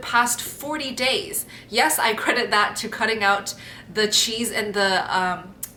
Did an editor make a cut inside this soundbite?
no; 0 cuts

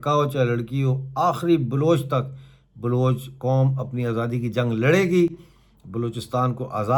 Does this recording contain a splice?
no; 0 cuts

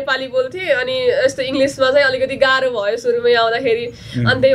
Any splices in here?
no; 0 cuts

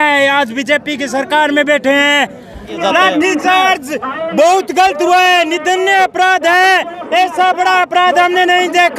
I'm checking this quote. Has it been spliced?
yes; 1 cut; at 2.7 s

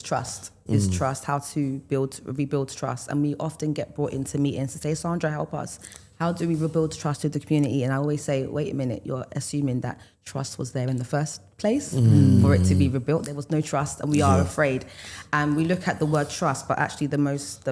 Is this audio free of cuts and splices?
yes; 0 cuts

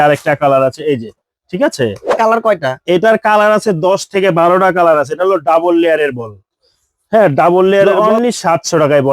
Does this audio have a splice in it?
yes; 2 cuts; at 2.1 s, 7.9 s

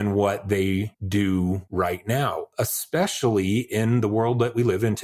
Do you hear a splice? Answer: yes; 2 cuts; at 1.0 s, 1.6 s

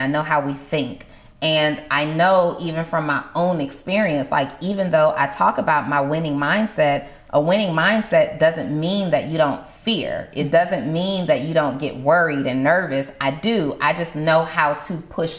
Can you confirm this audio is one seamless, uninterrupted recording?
yes; 0 cuts

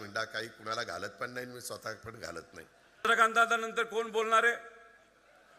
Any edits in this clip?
yes; 1 cut; at 3.1 s

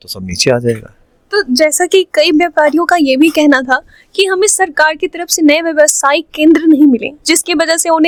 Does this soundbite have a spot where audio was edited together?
no; 0 cuts

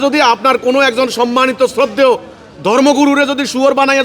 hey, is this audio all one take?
yes; 0 cuts

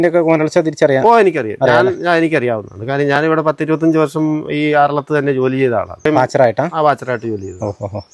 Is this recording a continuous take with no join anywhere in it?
no; 1 cut; at 6.1 s

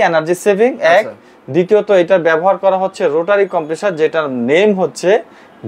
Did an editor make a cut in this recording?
no; 0 cuts

